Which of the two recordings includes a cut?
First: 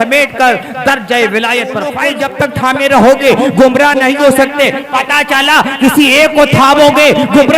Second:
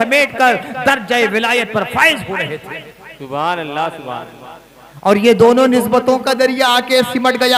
first; 1 cut; at 2.1 s

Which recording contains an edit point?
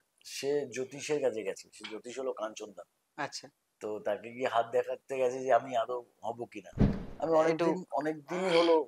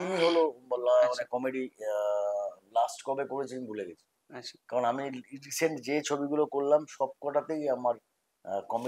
first; 1 cut; at 7.0 s

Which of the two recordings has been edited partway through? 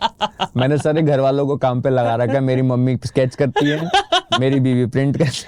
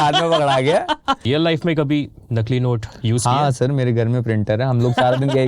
second; 1 cut; at 1.2 s

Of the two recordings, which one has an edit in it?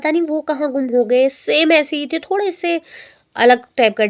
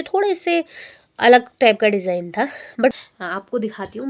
second; 1 cut; at 2.9 s

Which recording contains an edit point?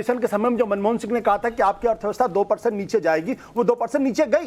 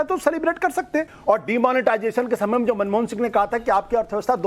second; 1 cut; at 1.1 s

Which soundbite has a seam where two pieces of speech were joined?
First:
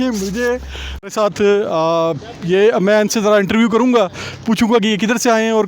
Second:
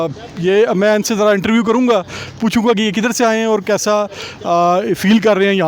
first; 1 cut; at 0.9 s

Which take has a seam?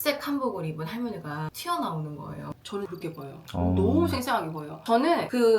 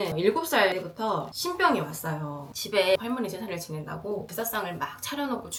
first; 2 cuts; at 2.5 s, 4.7 s

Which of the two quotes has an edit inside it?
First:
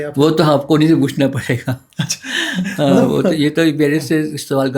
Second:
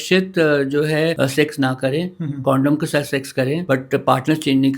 second; 2 cuts; at 1.2 s, 3.6 s

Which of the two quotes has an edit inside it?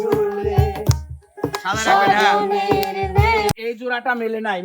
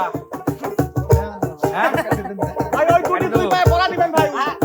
first; 1 cut; at 3.5 s

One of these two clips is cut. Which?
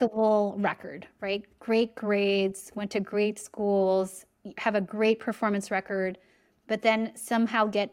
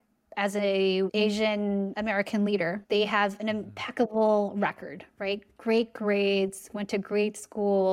second; 2 cuts; at 1.4 s, 2.8 s

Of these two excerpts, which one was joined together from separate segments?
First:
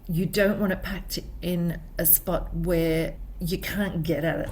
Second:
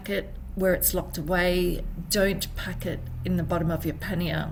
first; 1 cut; at 3.3 s

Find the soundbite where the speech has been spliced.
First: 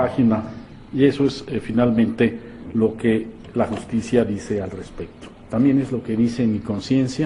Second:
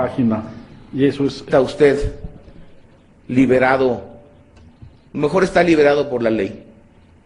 first; 1 cut; at 1.4 s

